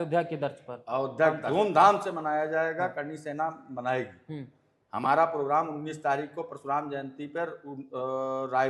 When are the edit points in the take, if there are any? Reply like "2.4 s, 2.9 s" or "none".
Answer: 1.4 s